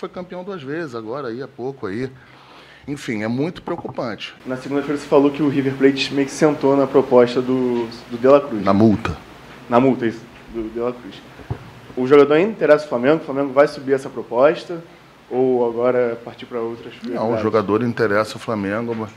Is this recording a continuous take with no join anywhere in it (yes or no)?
no